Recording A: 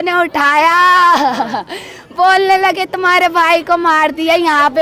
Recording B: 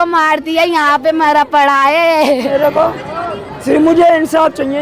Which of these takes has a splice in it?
B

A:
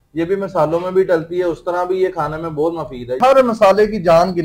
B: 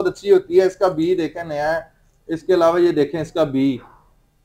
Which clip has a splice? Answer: A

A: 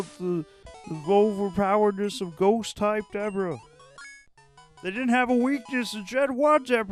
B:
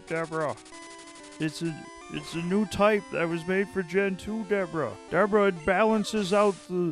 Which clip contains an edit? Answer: B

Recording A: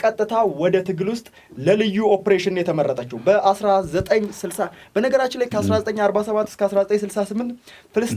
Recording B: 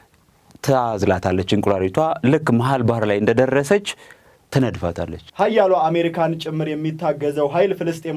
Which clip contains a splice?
B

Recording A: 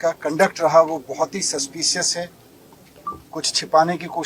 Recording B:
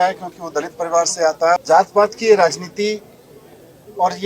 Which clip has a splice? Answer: B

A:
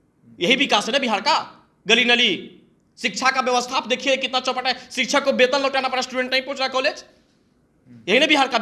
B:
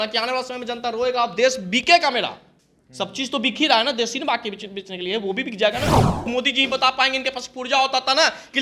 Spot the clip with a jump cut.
B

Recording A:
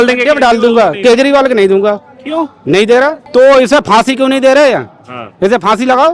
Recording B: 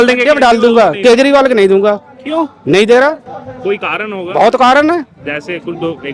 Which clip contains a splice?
A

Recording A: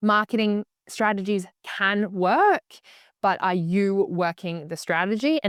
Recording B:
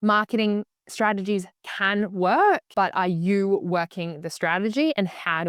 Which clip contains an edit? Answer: B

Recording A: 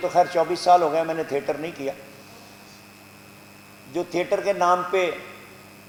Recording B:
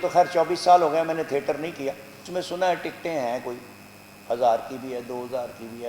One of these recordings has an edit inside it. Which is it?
B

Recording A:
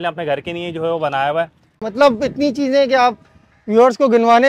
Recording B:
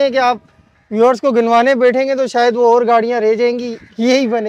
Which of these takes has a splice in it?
A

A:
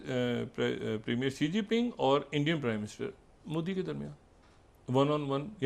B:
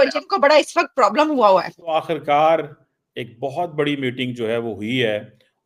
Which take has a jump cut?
B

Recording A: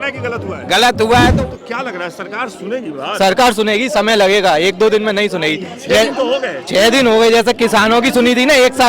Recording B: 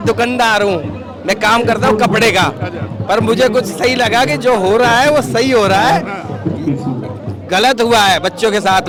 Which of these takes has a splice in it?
A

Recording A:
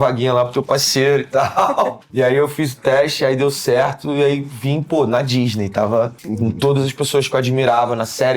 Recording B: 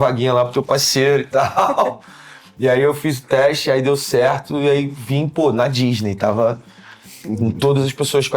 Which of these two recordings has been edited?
A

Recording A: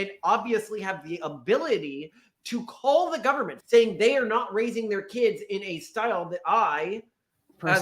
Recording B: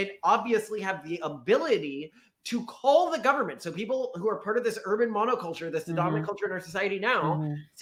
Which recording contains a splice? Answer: A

